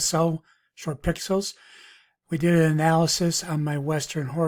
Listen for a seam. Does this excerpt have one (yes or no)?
no